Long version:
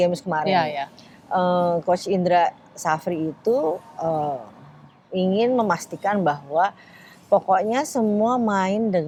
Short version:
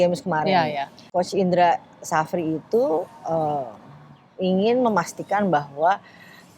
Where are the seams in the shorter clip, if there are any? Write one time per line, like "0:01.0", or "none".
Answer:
0:01.1